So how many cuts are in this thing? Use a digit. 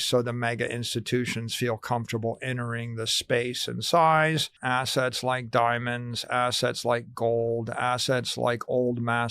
1